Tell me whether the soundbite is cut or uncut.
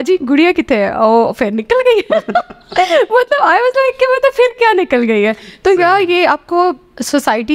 uncut